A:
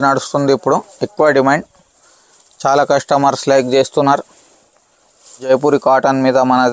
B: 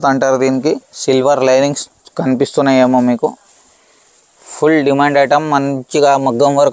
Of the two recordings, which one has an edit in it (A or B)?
A